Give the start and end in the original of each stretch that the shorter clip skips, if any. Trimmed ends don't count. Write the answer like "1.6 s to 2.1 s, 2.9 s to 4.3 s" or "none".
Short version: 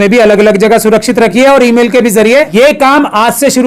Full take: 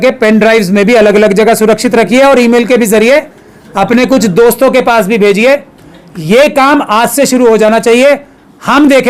3.3 s to 6.2 s